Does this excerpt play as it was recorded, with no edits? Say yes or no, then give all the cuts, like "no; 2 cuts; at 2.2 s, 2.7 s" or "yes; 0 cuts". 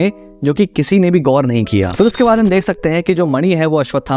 no; 1 cut; at 1.9 s